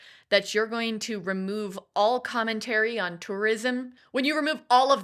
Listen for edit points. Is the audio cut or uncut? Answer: cut